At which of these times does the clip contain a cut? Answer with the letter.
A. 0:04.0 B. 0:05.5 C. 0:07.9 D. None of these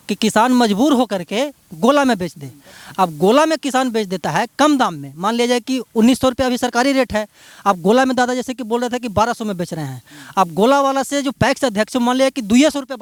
D